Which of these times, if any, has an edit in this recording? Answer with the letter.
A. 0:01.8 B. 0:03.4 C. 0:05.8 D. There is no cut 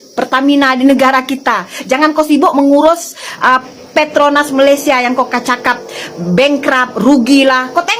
D